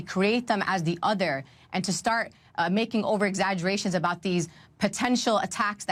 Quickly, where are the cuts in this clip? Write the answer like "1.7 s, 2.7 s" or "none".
none